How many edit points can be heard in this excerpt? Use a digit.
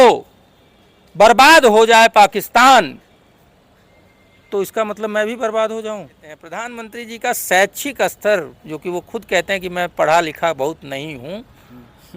1